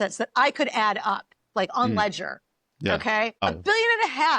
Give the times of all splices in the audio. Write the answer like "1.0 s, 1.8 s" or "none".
3.5 s